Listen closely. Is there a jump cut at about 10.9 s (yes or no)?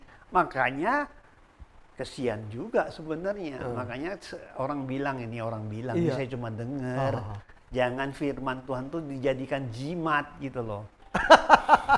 yes